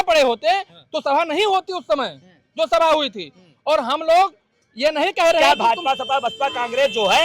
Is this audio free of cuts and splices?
no; 1 cut; at 5.4 s

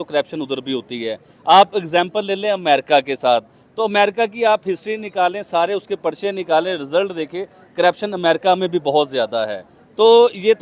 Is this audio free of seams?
yes; 0 cuts

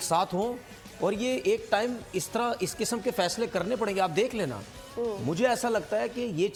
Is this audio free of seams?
yes; 0 cuts

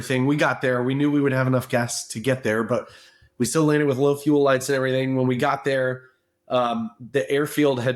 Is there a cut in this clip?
no; 0 cuts

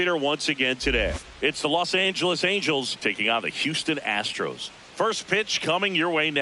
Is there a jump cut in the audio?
yes; 2 cuts; at 1.2 s, 4.7 s

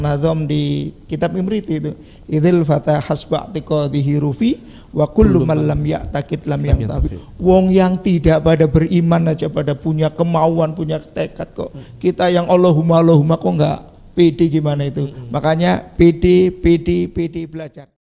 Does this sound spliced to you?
no; 0 cuts

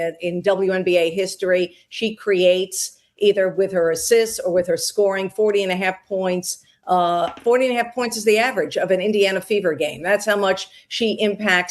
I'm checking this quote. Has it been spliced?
yes; 1 cut; at 9.4 s

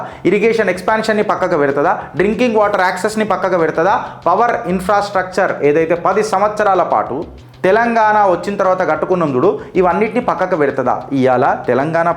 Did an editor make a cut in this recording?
no; 0 cuts

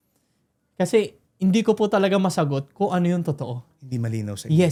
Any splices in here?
no; 0 cuts

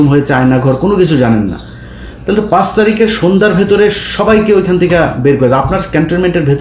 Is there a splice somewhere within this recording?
no; 0 cuts

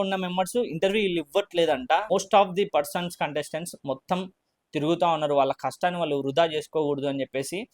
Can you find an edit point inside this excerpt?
yes; 1 cut; at 2.1 s

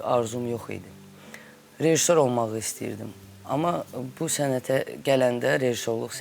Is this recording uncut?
yes; 0 cuts

